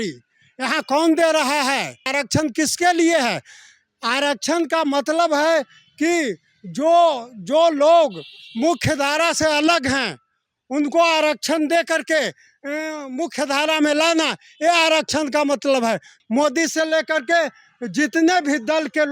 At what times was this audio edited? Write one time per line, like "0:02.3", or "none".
0:02.1
0:16.1